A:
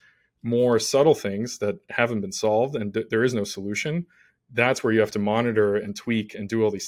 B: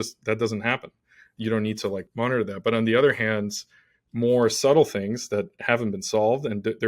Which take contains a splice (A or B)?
B